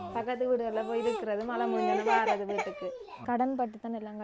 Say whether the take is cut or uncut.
cut